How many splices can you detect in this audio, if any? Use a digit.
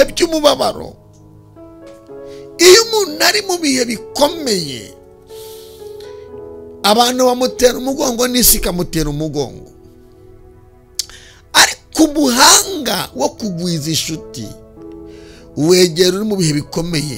0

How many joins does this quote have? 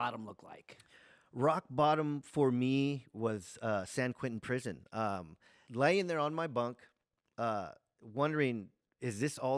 1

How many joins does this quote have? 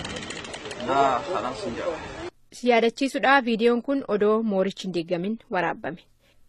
1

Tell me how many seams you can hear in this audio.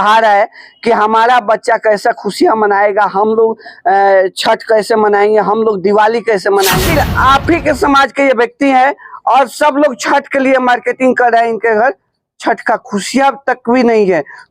1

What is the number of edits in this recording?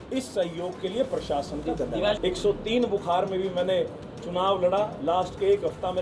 1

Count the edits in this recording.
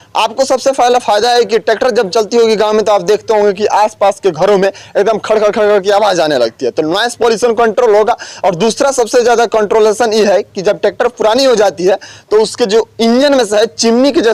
0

